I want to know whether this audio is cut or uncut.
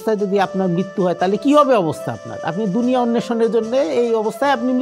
uncut